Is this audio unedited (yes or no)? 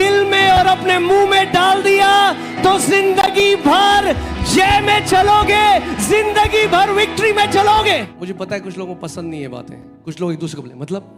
no